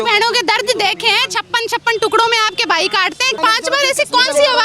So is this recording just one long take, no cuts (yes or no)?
no